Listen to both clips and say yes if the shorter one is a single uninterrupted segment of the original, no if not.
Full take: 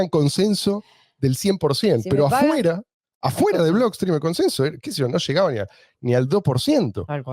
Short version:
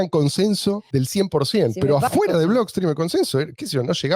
no